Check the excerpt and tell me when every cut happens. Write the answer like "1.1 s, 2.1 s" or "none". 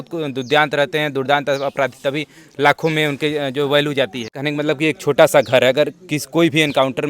4.4 s